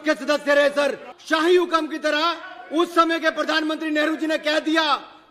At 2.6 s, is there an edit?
no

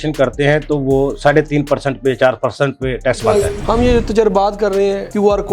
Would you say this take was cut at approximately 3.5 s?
yes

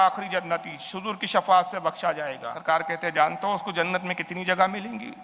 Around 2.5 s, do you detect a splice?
yes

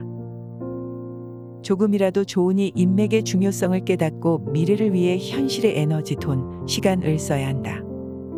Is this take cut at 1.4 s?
no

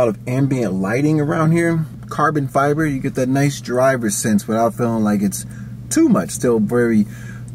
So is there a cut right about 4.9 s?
no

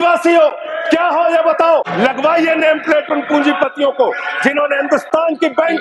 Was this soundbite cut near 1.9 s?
yes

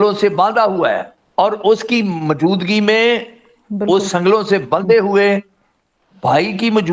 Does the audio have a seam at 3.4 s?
no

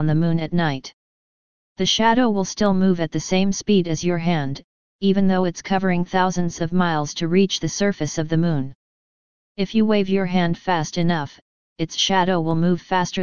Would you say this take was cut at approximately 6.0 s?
yes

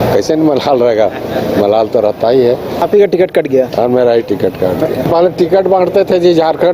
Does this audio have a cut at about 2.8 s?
yes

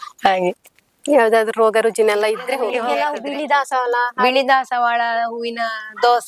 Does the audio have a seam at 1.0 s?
no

